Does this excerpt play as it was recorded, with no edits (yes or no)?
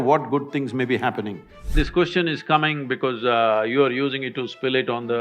no